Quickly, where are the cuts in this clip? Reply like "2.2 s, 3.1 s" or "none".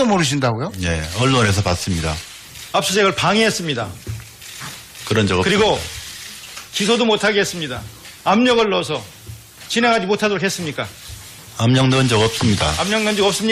8.7 s